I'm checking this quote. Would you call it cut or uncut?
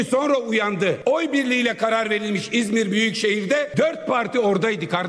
cut